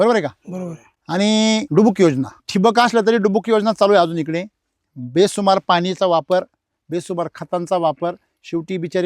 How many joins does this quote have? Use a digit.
2